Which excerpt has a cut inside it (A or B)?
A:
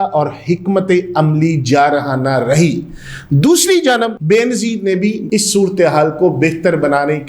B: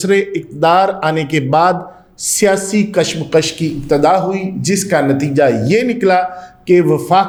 A